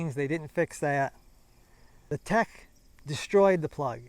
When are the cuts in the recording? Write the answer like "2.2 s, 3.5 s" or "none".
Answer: 2.0 s